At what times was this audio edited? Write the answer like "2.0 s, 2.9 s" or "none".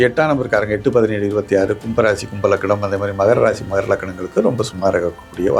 none